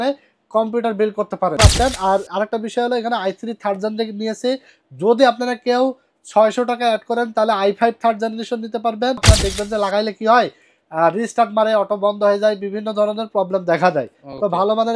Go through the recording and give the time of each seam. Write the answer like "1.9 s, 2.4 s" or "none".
1.6 s, 9.2 s